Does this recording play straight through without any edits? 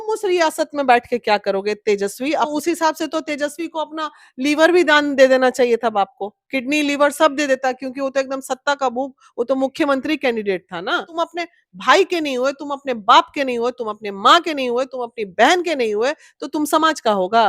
no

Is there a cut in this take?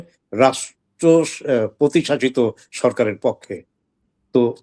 no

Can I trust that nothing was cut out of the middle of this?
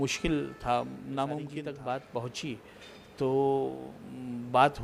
no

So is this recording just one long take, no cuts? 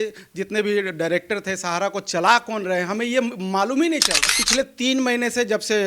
yes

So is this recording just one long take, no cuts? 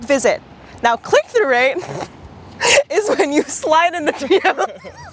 yes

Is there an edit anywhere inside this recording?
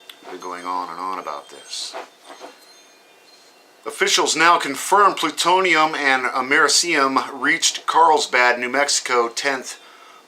yes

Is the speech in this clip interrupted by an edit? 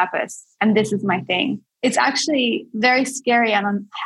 yes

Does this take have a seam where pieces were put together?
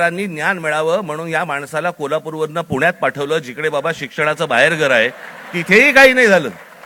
no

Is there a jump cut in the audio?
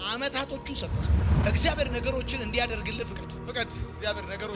no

